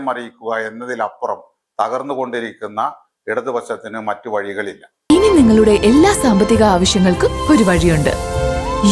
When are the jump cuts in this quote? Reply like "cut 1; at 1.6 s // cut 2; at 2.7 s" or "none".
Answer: cut 1; at 4.9 s